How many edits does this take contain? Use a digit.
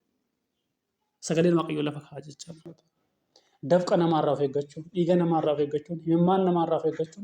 1